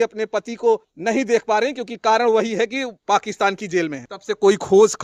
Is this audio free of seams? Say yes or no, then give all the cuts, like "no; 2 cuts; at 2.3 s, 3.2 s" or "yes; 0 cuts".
no; 2 cuts; at 0.9 s, 4.0 s